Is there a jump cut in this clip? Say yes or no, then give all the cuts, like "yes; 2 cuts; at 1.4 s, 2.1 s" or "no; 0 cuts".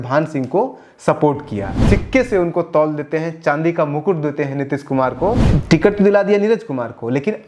yes; 2 cuts; at 1.8 s, 5.4 s